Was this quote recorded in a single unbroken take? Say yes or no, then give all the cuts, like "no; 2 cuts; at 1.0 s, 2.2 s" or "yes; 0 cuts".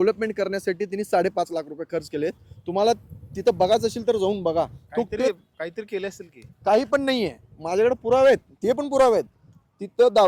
yes; 0 cuts